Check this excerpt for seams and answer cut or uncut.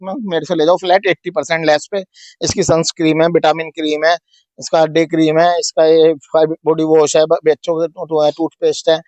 uncut